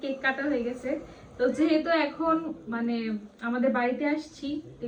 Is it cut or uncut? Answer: uncut